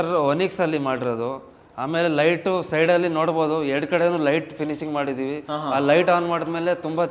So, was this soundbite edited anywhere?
no; 0 cuts

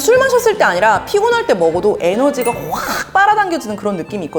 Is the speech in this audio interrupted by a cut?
no; 0 cuts

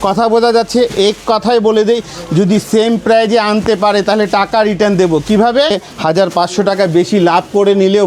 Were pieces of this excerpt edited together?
yes; 1 cut; at 5.9 s

